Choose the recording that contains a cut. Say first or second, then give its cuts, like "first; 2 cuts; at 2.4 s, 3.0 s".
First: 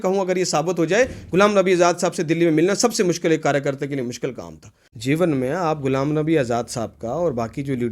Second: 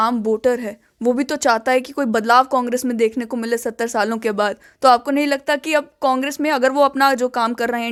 first; 1 cut; at 4.9 s